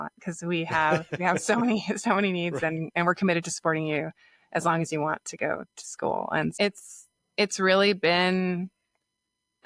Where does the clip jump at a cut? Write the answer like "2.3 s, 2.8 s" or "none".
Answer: 6.5 s